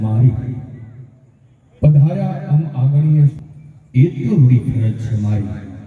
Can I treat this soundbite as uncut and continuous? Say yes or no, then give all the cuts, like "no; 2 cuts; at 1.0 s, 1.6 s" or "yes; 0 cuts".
no; 1 cut; at 3.4 s